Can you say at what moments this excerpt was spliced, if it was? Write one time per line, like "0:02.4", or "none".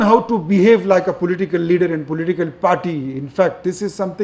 none